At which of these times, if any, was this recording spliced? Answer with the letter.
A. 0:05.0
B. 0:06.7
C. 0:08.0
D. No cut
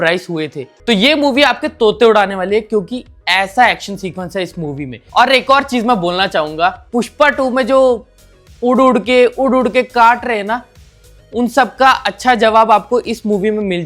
A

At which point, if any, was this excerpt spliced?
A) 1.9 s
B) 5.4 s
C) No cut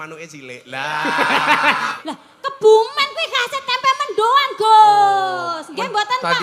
A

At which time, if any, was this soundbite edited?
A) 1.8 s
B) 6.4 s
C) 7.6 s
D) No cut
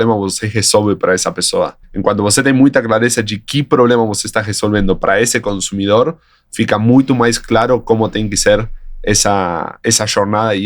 A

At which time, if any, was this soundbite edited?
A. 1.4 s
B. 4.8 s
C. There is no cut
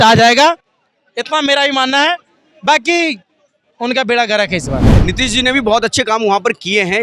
B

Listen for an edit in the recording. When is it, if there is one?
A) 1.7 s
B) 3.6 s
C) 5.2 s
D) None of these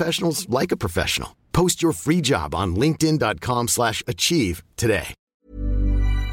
C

